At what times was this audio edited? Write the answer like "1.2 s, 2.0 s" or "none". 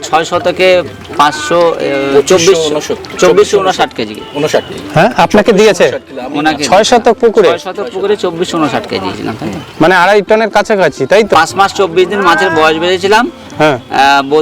9.2 s, 11.3 s